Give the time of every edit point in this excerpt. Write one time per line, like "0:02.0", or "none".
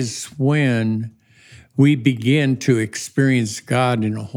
none